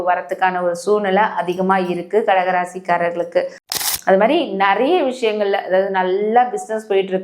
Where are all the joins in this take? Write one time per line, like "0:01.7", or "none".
0:03.8